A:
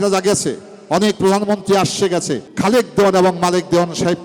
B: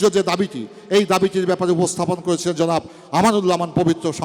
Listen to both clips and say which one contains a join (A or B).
A